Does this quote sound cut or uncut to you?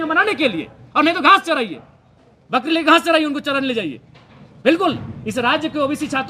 uncut